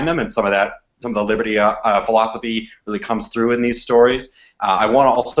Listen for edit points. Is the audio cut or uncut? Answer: uncut